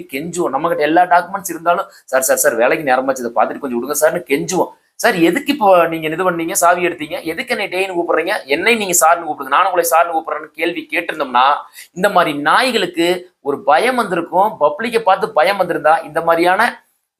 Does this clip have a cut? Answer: no; 0 cuts

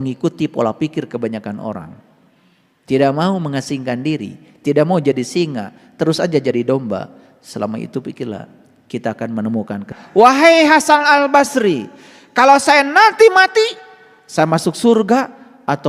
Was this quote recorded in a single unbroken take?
no; 1 cut; at 9.9 s

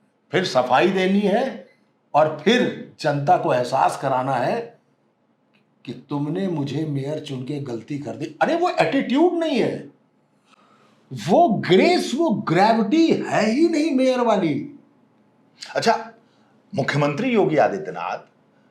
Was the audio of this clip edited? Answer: no; 0 cuts

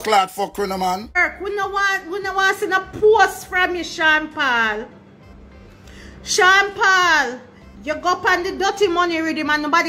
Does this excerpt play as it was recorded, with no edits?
no; 1 cut; at 1.2 s

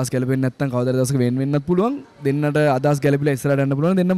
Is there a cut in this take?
no; 0 cuts

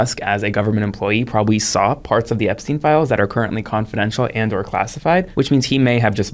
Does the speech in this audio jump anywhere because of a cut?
yes; 1 cut; at 5.3 s

